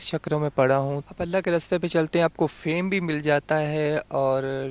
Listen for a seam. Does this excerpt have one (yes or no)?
no